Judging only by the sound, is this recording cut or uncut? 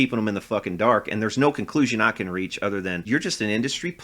cut